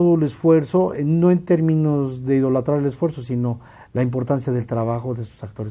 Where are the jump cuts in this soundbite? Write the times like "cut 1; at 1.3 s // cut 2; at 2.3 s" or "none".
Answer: none